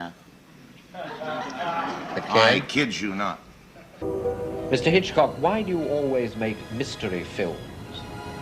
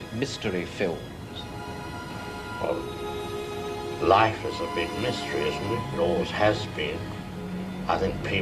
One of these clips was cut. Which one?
first; 1 cut; at 4.0 s

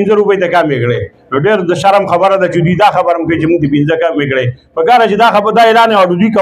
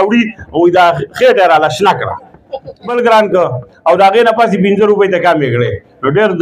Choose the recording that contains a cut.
second; 1 cut; at 2.9 s

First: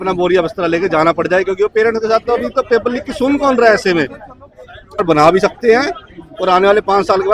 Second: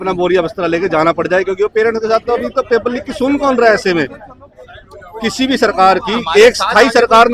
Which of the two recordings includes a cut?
first; 1 cut; at 5.0 s

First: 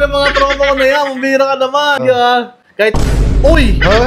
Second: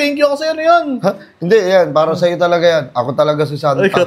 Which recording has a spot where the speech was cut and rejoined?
first; 1 cut; at 2.0 s

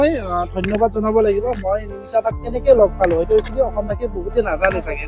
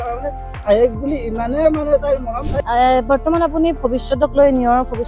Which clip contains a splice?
second; 1 cut; at 2.5 s

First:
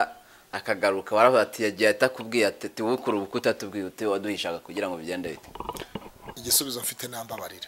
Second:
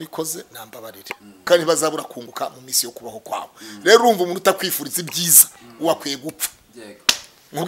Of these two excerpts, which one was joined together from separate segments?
second; 1 cut; at 1.5 s

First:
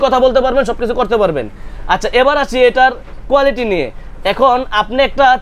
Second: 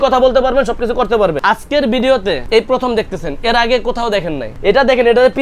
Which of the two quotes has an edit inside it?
second; 3 cuts; at 1.4 s, 2.4 s, 4.4 s

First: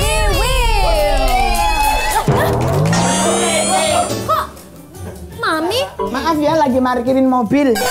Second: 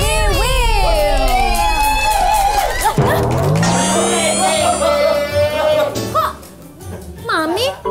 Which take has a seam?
first; 2 cuts; at 2.0 s, 4.1 s

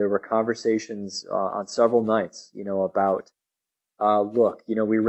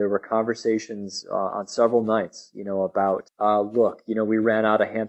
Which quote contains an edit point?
second; 1 cut; at 3.3 s

